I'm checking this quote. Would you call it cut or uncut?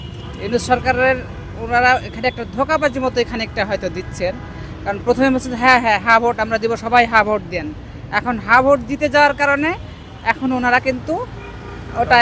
uncut